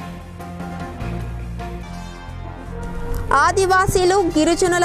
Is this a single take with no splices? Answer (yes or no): yes